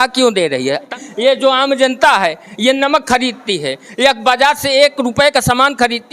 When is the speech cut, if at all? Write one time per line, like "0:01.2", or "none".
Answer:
0:00.9